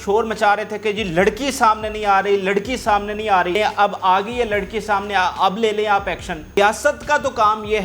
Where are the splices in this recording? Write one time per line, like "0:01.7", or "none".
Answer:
0:03.6
0:06.6